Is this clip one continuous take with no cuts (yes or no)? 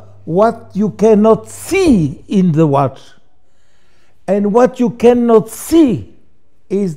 yes